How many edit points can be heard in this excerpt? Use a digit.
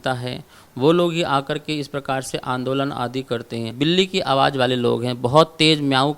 1